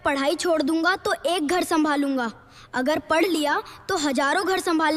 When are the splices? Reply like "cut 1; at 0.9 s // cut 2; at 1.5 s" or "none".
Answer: none

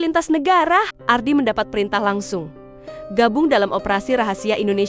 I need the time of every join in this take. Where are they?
none

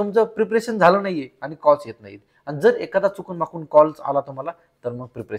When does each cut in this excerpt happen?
none

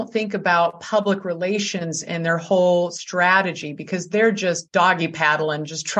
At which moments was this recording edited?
cut 1; at 4.6 s

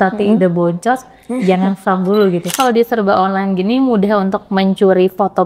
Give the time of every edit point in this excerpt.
cut 1; at 2.6 s

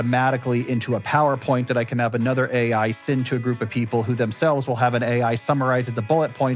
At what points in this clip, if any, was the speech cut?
none

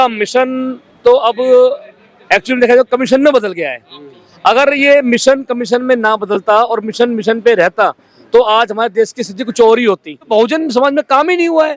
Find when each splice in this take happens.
cut 1; at 10.2 s

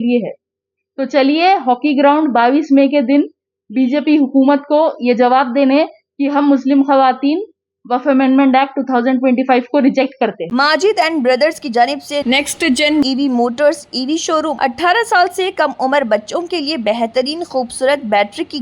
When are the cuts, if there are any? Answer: cut 1; at 10.4 s // cut 2; at 14.5 s

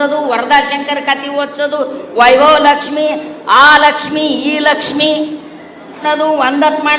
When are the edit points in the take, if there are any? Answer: cut 1; at 6.0 s

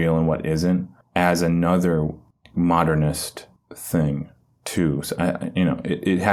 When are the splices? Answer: none

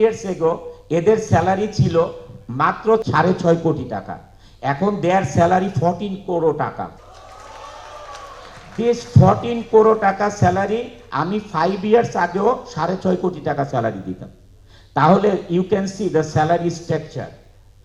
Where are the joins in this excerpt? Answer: cut 1; at 3.0 s // cut 2; at 6.9 s

